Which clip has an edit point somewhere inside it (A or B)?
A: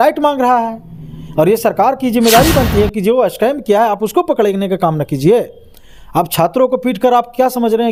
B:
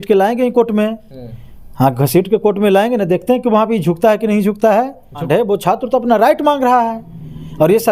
B